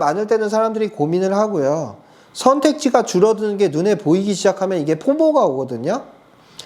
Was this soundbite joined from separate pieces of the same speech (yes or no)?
no